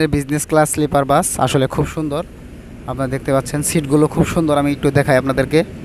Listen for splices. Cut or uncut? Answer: uncut